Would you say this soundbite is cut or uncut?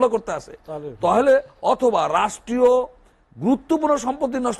uncut